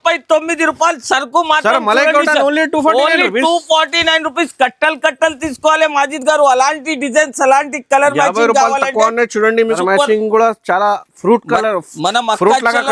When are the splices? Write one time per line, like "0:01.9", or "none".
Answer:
0:09.7